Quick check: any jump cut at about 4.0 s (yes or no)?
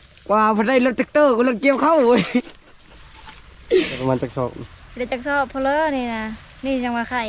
yes